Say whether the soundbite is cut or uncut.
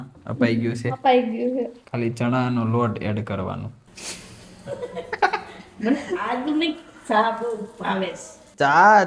cut